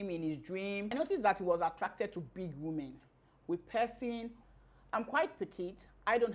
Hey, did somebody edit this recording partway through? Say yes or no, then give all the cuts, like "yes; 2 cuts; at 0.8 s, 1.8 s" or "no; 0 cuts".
yes; 2 cuts; at 0.9 s, 4.4 s